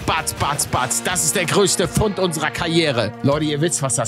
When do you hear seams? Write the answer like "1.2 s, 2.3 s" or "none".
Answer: 3.1 s